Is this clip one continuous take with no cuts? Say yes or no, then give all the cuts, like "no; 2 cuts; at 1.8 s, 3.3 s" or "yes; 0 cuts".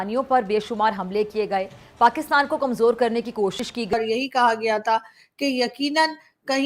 no; 1 cut; at 3.9 s